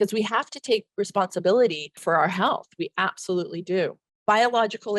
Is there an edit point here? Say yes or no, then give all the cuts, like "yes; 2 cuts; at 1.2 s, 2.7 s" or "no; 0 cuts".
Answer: yes; 2 cuts; at 1.9 s, 4.1 s